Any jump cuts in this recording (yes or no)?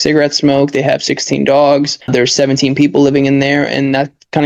yes